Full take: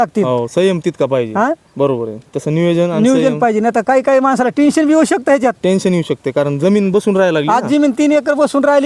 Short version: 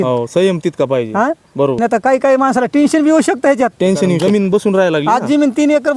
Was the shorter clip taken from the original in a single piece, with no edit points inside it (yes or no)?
no